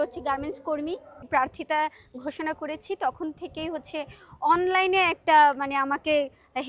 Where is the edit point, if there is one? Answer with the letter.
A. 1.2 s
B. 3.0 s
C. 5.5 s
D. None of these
A